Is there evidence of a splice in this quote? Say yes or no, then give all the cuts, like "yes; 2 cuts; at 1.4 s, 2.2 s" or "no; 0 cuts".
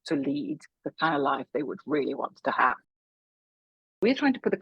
yes; 1 cut; at 3.4 s